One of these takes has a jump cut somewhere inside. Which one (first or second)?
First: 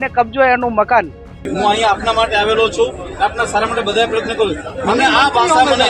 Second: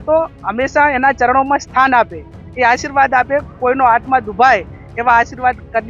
first